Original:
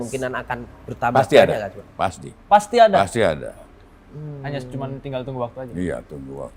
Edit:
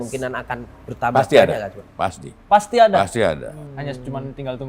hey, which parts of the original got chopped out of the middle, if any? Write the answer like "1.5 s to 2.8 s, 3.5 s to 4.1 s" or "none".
3.6 s to 4.3 s

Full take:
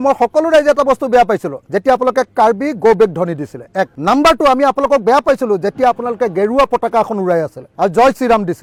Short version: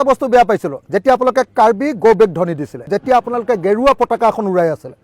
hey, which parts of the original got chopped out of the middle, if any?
3.7 s to 5.6 s

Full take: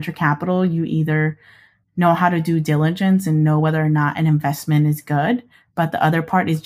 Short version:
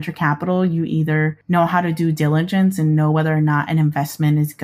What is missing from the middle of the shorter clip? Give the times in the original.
1.4 s to 1.9 s

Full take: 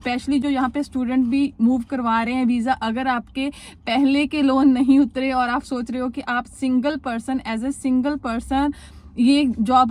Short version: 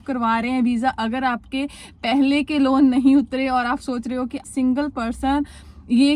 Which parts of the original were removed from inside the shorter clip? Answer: 6.3 s to 7.7 s

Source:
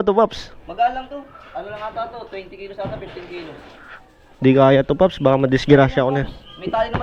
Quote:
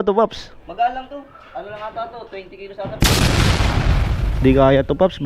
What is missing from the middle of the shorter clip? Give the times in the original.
none

